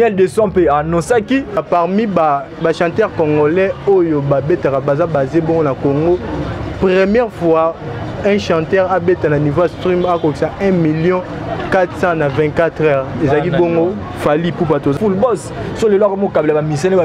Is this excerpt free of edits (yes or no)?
no